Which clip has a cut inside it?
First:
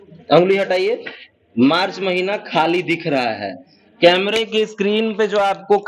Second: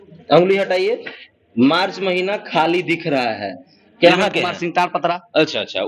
second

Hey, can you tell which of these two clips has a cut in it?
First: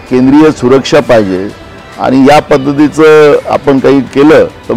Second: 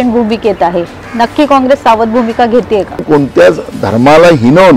second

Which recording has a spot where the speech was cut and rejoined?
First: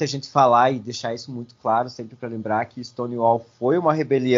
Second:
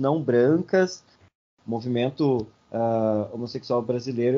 second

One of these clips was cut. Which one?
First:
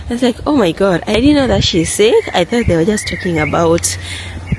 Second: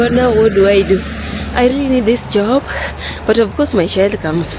first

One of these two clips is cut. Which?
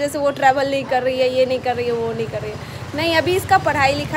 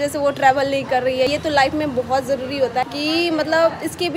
second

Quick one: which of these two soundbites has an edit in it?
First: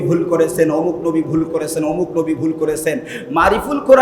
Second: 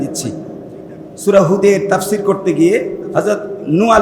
second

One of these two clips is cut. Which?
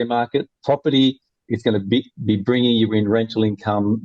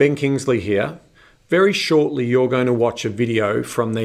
first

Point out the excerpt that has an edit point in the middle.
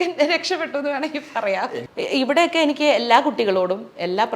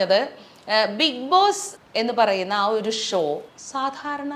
first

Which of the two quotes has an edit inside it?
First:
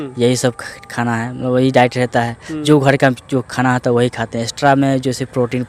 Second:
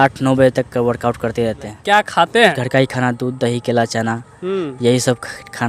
second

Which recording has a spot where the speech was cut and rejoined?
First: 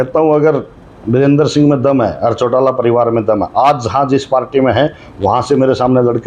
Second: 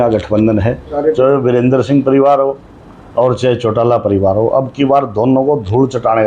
second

